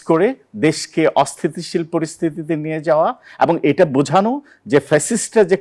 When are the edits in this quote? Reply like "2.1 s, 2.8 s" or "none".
none